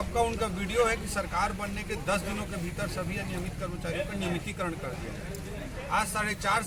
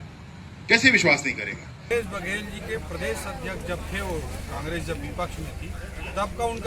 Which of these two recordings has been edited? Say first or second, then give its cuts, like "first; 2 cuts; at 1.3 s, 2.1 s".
second; 1 cut; at 1.7 s